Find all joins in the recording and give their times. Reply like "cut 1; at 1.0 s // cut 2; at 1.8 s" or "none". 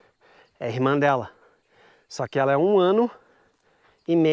none